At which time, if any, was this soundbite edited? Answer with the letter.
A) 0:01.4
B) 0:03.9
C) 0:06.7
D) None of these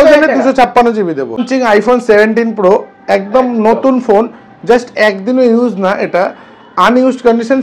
A